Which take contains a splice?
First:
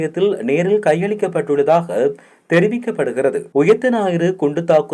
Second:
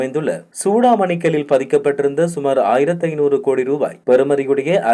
first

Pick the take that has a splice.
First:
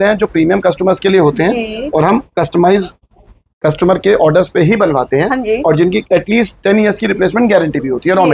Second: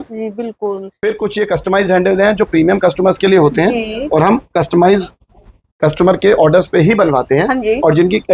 second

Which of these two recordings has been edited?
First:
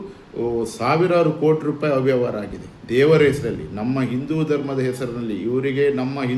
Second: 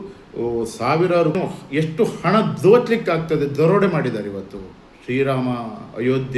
second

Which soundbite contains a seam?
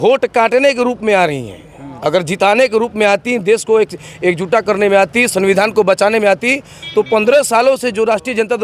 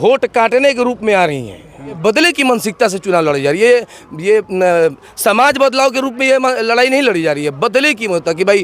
second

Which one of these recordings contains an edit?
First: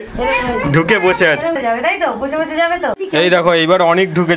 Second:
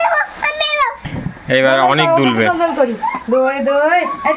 first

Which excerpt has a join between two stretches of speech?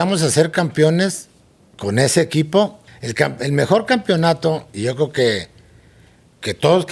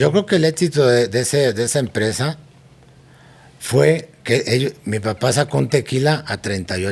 first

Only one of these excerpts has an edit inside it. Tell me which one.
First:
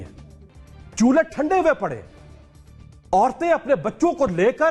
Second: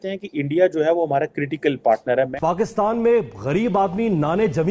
second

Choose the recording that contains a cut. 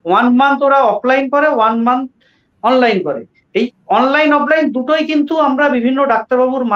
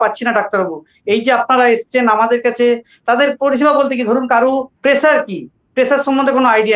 second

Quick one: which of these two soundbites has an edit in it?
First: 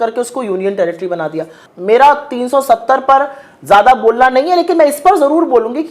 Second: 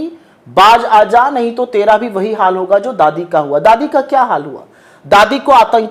first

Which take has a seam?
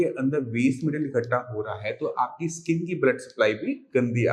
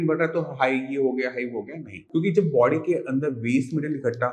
second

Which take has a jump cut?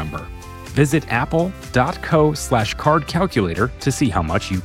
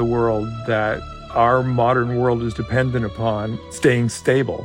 second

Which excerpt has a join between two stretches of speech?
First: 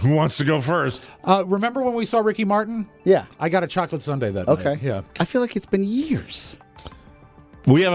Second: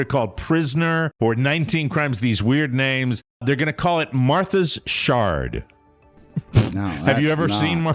second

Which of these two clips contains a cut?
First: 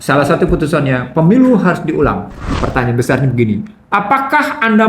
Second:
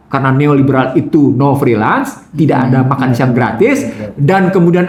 first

